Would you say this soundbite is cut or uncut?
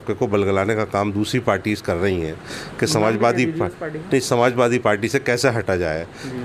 uncut